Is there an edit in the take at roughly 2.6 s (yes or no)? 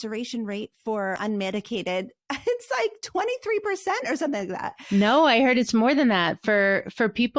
no